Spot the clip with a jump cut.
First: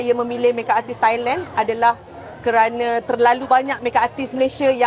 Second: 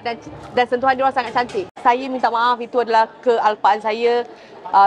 second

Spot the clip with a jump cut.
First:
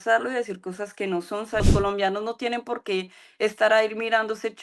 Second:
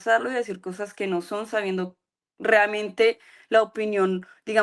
first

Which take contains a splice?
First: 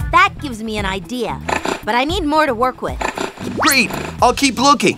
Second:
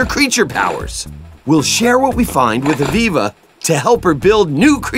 first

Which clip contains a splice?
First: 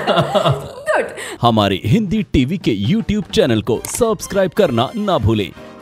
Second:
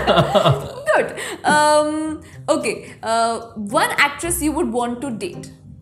first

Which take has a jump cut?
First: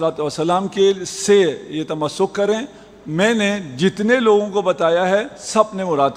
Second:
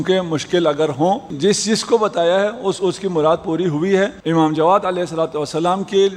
second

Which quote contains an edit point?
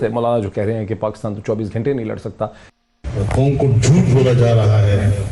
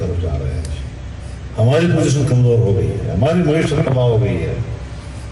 first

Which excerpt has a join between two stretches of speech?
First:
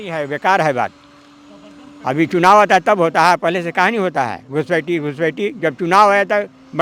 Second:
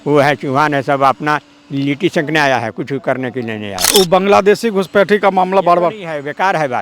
second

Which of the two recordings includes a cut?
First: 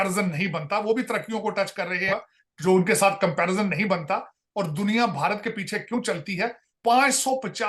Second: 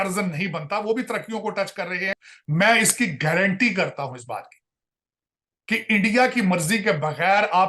second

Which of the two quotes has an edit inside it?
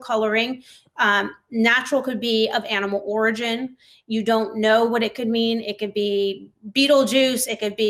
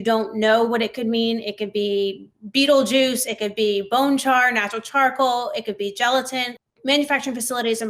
second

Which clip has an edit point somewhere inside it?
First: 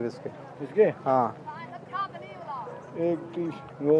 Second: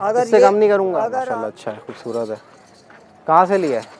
second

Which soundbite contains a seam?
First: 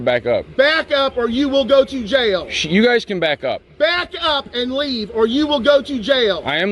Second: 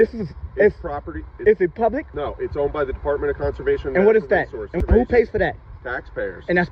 second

